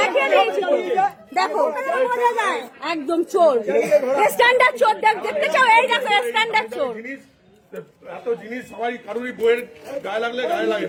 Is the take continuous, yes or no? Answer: yes